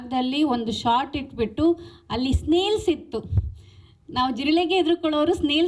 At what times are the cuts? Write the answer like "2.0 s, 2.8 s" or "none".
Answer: none